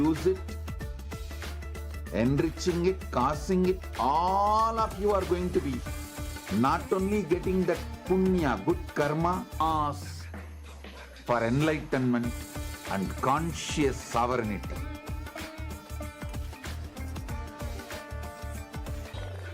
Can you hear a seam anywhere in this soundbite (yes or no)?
yes